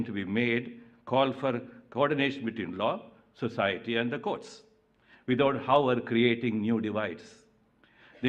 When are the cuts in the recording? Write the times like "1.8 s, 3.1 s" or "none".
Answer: none